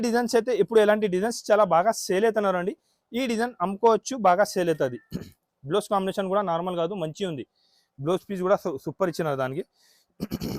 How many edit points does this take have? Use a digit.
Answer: 0